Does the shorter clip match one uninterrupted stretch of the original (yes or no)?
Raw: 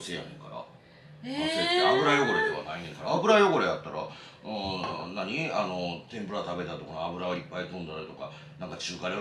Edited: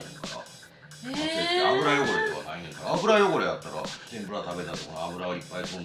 no